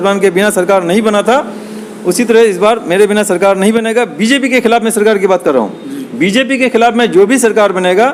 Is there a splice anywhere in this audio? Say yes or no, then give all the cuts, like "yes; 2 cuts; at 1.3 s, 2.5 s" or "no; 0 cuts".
no; 0 cuts